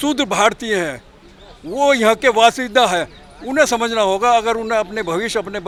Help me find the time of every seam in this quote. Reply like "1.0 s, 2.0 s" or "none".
none